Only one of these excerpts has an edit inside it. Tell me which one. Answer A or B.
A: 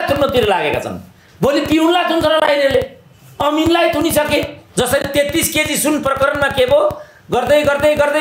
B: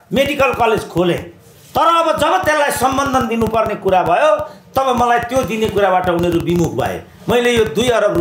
A